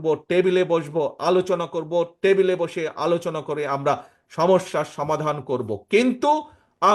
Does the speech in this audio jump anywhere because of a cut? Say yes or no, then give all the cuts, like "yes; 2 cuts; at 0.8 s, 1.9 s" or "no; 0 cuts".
no; 0 cuts